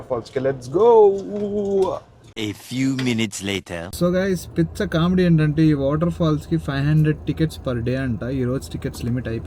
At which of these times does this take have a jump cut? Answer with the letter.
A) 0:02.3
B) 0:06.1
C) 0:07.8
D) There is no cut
A